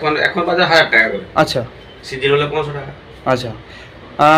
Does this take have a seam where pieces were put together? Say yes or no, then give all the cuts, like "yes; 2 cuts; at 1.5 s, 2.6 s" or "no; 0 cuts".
no; 0 cuts